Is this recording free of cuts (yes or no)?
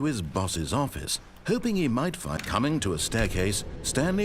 no